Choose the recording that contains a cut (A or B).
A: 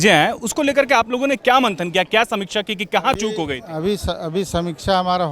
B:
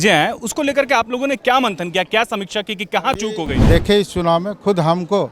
B